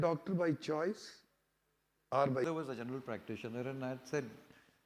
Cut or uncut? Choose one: cut